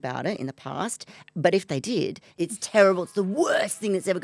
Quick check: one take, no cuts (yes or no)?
no